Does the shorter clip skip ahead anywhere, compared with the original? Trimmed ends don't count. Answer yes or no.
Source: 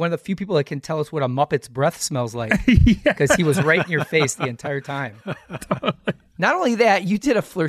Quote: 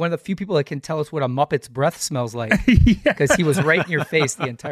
no